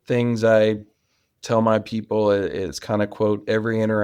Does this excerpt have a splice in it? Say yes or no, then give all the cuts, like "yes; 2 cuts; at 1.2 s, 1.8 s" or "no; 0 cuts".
no; 0 cuts